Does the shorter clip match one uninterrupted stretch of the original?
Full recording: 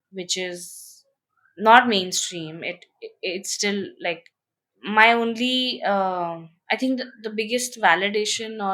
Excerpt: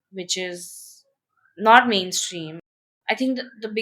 no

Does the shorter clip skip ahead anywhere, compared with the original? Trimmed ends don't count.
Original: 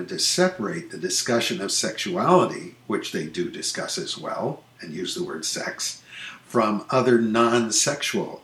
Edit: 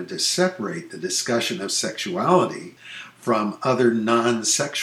yes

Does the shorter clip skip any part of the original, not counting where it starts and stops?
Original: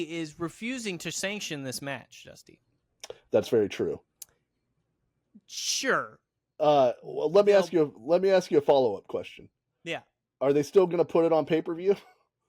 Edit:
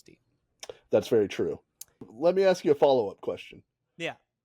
yes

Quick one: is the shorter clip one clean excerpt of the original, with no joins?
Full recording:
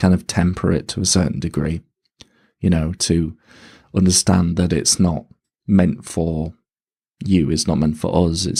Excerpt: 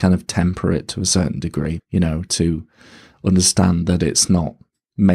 no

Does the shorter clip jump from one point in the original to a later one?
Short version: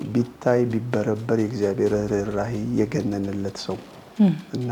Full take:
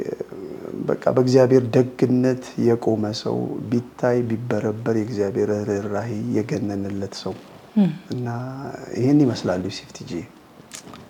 no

